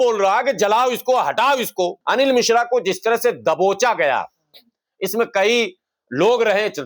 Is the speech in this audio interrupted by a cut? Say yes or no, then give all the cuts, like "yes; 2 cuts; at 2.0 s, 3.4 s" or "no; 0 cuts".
yes; 1 cut; at 2.0 s